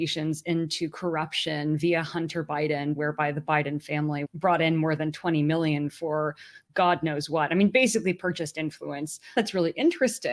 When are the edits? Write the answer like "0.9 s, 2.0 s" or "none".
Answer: 4.2 s, 9.4 s

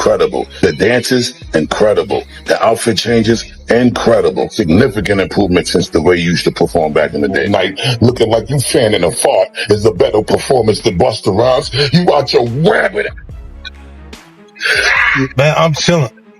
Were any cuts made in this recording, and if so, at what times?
15.3 s

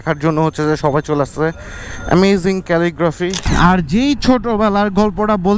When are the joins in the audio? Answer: 3.5 s

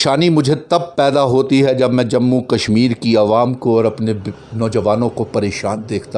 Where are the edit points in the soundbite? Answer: none

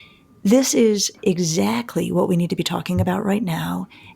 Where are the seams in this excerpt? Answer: 1.2 s

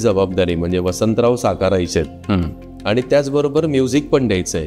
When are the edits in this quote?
none

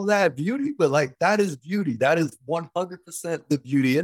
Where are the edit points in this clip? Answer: none

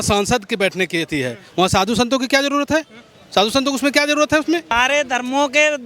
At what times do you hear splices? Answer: 4.7 s

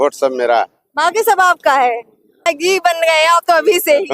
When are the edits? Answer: 2.4 s

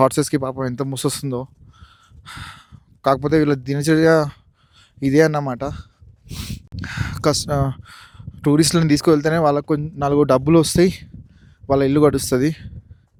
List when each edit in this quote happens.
none

